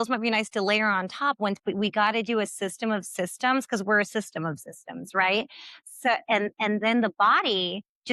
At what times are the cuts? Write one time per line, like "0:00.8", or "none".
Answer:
none